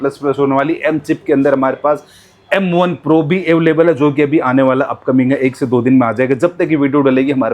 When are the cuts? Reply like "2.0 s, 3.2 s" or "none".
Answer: none